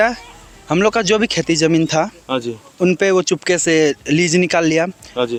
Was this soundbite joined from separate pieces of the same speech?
no; 0 cuts

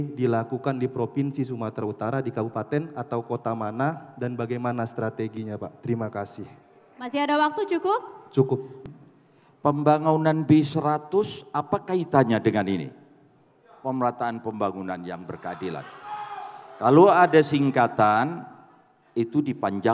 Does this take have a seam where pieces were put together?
yes; 1 cut; at 8.9 s

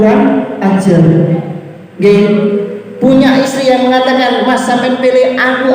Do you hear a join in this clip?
yes; 1 cut; at 1.8 s

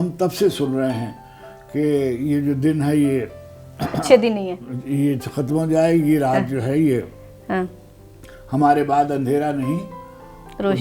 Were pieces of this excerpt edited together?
no; 0 cuts

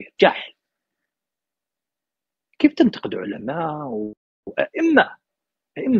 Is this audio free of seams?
yes; 0 cuts

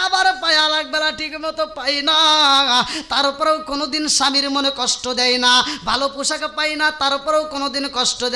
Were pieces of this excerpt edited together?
no; 0 cuts

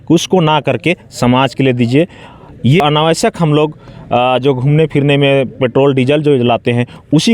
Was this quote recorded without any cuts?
no; 1 cut; at 2.8 s

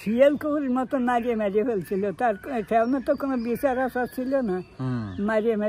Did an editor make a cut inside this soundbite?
no; 0 cuts

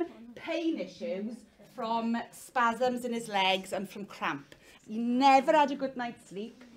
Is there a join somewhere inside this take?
yes; 1 cut; at 4.7 s

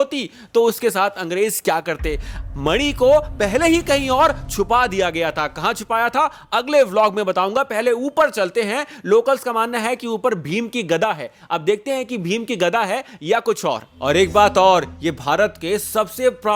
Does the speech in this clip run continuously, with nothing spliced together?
yes; 0 cuts

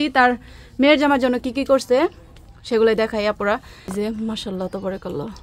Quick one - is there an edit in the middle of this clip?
yes; 1 cut; at 3.9 s

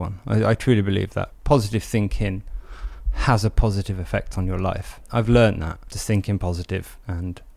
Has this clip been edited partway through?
yes; 1 cut; at 1.3 s

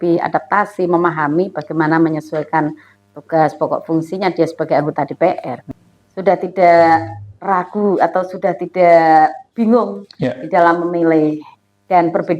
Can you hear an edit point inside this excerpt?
yes; 1 cut; at 5.6 s

